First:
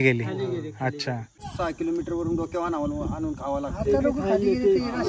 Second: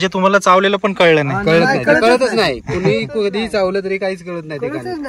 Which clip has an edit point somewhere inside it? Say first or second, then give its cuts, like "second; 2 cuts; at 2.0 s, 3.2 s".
first; 1 cut; at 1.5 s